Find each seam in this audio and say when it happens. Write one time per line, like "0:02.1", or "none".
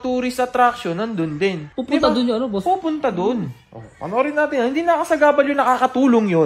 0:01.5